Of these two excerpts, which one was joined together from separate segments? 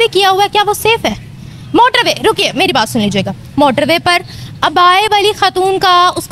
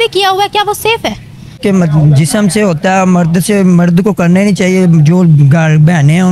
second; 1 cut; at 1.6 s

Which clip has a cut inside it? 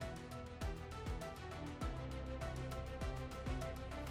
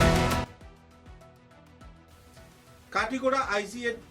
second; 1 cut; at 2.1 s

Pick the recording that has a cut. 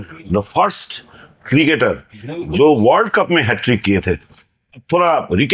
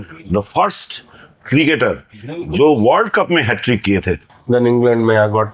second; 1 cut; at 4.3 s

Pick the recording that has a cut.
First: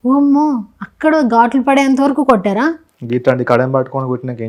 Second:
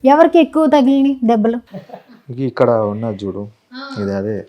second; 1 cut; at 1.7 s

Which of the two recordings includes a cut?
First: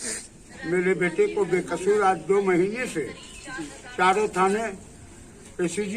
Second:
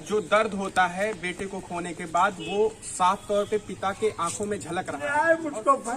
second; 1 cut; at 5.0 s

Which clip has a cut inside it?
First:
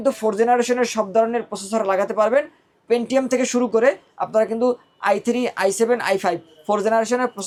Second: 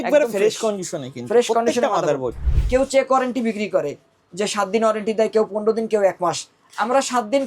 second; 1 cut; at 2.5 s

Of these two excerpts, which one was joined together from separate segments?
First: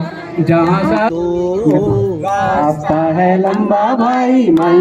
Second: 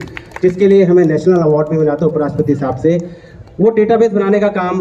first; 1 cut; at 1.1 s

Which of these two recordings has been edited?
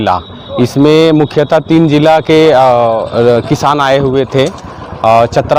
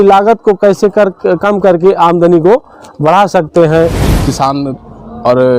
second; 1 cut; at 4.1 s

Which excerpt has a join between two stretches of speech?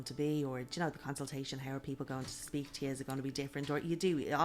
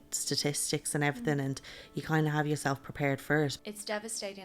second; 1 cut; at 3.6 s

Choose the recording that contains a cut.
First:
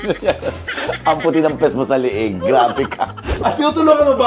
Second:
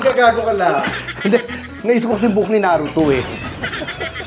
first; 1 cut; at 3.3 s

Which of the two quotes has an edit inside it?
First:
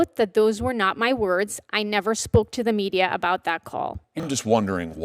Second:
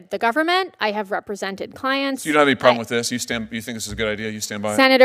first; 1 cut; at 4.1 s

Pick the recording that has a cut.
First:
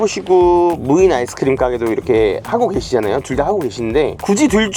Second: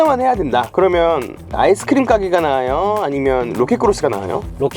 second; 1 cut; at 1.5 s

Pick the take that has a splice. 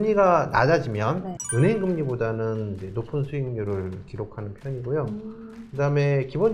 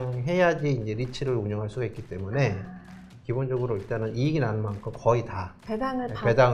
first; 1 cut; at 1.3 s

